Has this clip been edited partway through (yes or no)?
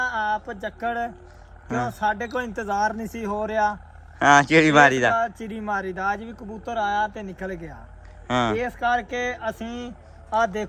no